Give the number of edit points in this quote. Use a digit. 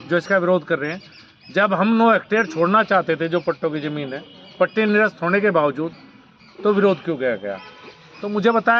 0